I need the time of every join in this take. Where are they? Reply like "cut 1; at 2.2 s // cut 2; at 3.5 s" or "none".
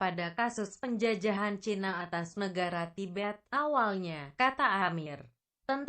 cut 1; at 4.4 s